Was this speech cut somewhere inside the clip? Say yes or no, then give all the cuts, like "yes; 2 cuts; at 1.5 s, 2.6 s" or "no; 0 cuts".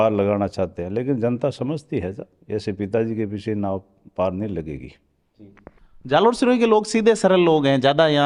no; 0 cuts